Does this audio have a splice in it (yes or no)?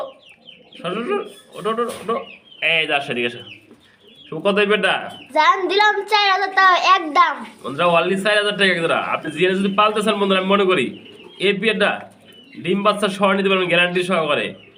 no